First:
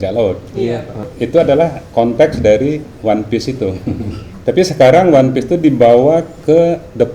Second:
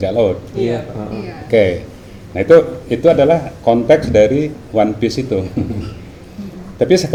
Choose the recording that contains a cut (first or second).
first